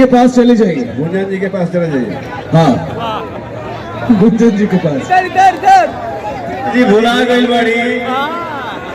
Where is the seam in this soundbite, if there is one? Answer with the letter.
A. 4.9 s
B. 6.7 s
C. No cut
B